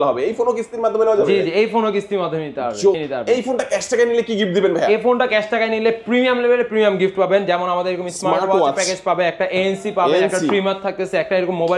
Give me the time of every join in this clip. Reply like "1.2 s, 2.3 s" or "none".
2.9 s